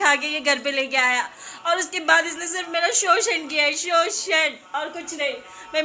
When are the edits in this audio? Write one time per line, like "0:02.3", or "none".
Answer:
none